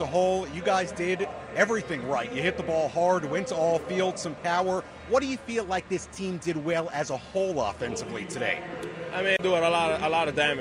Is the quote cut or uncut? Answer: cut